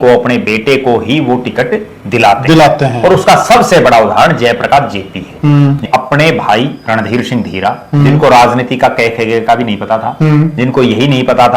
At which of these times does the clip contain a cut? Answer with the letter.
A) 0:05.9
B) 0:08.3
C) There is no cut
A